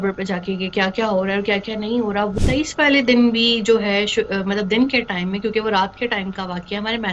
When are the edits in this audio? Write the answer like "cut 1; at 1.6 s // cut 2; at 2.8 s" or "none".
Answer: cut 1; at 2.3 s